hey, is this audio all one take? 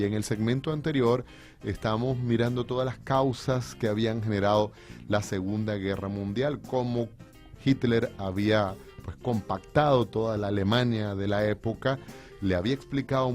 no; 1 cut; at 2.5 s

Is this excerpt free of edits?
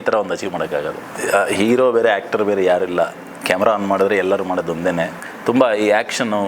no; 2 cuts; at 1.0 s, 5.2 s

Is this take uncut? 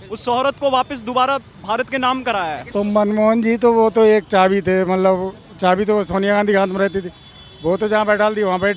no; 1 cut; at 2.6 s

